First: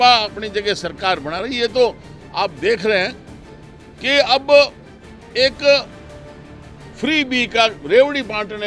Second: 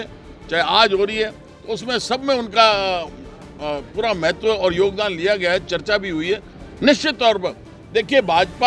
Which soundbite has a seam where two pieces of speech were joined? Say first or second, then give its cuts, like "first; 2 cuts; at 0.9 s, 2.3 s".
second; 1 cut; at 6.6 s